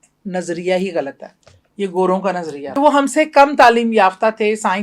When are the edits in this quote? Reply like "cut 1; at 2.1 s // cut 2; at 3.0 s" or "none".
cut 1; at 2.7 s